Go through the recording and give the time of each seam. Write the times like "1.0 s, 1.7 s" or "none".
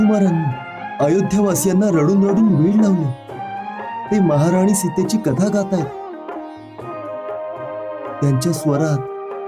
none